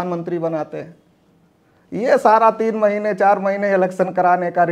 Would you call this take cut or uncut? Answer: uncut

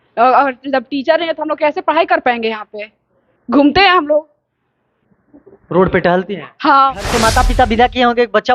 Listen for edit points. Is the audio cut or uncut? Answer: cut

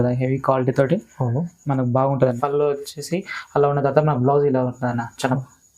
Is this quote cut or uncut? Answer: cut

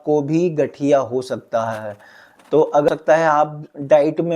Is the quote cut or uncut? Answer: cut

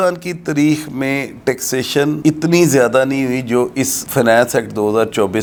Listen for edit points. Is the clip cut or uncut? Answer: uncut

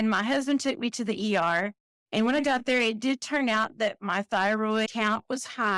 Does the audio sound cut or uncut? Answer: uncut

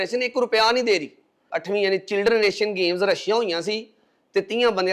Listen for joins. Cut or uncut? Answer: cut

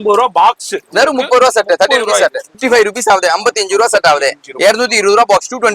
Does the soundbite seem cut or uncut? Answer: cut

